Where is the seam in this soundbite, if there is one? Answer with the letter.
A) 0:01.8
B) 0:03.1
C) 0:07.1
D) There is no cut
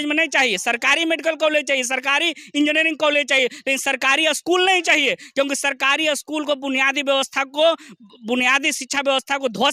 D